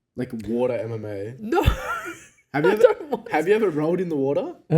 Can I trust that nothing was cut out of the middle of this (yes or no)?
yes